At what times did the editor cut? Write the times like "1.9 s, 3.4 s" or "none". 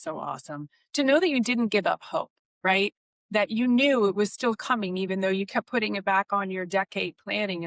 none